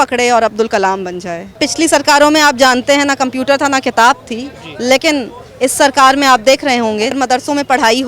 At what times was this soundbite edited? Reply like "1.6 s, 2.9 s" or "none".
1.5 s, 7.1 s